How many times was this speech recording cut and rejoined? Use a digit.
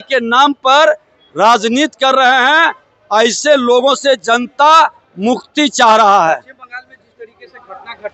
0